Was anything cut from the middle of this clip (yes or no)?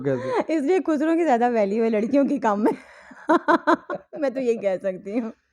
no